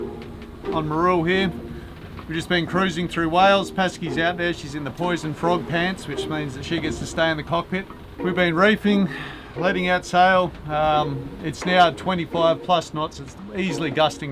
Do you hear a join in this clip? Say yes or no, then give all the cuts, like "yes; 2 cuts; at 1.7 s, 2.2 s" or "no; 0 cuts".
yes; 1 cut; at 8.0 s